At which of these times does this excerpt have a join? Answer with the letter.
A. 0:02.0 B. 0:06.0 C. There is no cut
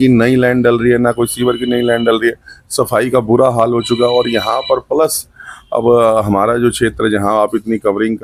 C